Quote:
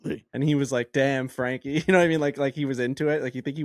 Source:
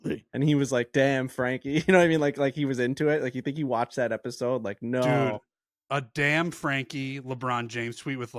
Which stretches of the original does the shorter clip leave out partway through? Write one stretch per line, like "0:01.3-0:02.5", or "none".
none

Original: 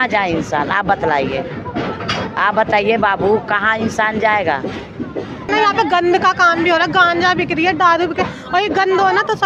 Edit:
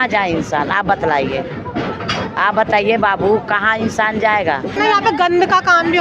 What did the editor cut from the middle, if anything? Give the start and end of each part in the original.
0:04.7-0:05.4

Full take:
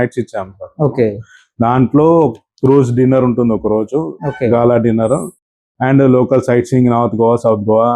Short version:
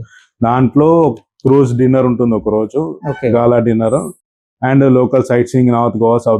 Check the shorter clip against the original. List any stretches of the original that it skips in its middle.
none

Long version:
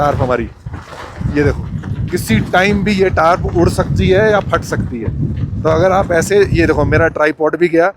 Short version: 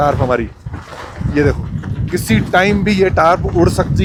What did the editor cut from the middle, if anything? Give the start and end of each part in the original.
none

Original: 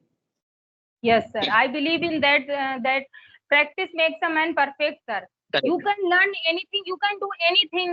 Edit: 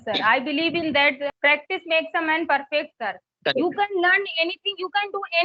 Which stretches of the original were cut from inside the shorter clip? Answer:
0:02.6-0:03.4

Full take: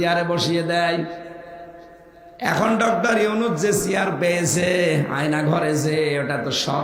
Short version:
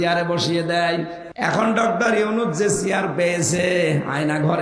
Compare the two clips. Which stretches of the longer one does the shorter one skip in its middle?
0:01.2-0:02.2

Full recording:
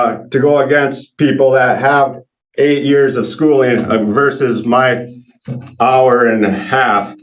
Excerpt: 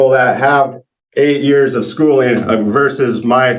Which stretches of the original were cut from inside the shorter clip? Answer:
none

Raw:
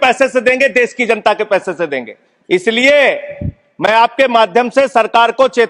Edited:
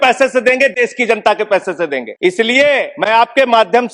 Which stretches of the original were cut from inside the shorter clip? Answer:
0:02.0-0:02.3
0:03.2-0:03.7

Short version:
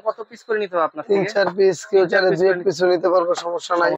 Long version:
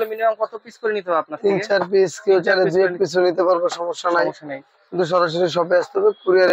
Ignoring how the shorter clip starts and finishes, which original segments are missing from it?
none

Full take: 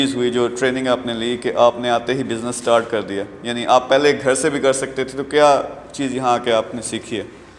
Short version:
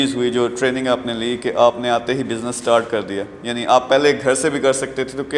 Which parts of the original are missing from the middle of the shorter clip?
none

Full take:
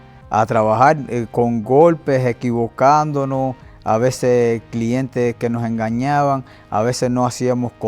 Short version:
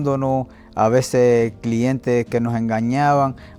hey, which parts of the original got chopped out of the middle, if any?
none

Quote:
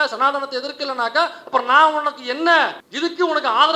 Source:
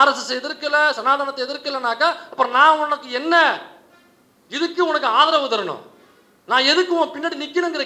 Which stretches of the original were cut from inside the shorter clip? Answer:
0:03.7-0:04.4

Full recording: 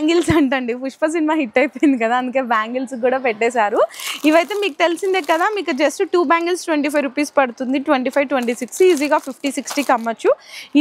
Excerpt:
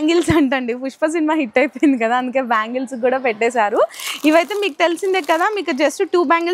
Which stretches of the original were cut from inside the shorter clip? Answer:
none

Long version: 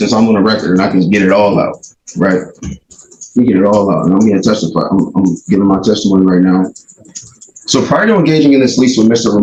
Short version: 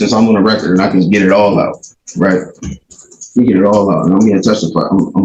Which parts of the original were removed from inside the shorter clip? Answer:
none

